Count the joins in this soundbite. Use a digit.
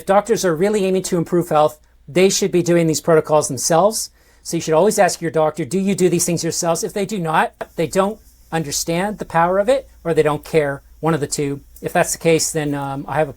1